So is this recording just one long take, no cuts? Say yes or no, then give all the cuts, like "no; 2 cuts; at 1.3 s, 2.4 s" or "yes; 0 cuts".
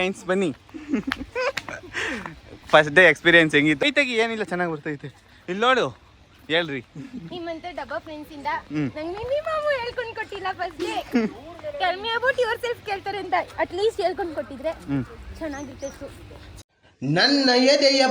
no; 2 cuts; at 3.8 s, 16.5 s